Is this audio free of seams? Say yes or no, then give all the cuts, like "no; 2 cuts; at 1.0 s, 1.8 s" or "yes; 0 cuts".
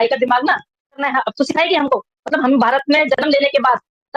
no; 1 cut; at 1.1 s